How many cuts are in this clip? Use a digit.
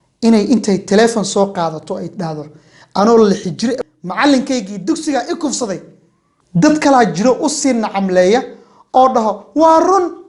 2